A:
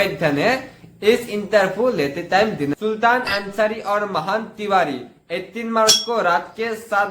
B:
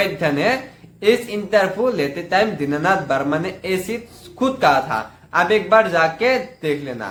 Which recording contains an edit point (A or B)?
A